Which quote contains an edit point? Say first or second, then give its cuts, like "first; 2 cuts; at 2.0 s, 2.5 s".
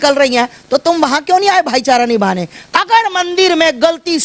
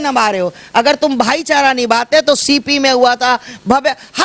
first; 1 cut; at 2.6 s